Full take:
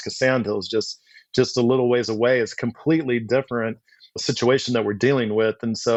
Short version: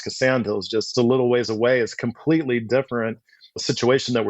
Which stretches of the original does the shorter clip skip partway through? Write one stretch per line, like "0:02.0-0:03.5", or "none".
0:00.9-0:01.5